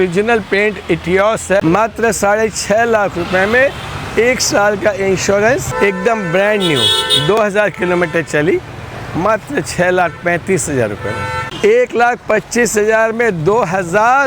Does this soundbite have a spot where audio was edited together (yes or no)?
yes